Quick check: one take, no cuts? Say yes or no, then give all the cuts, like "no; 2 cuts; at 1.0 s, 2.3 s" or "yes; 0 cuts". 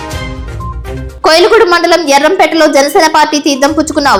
yes; 0 cuts